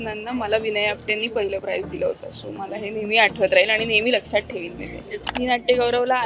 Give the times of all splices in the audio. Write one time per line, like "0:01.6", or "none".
0:05.3